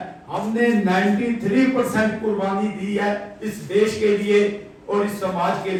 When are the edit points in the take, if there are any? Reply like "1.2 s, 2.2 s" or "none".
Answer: none